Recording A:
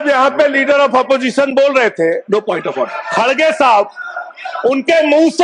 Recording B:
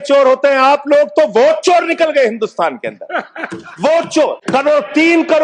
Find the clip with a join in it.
B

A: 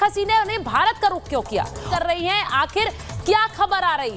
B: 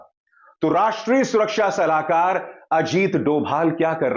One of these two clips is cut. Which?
A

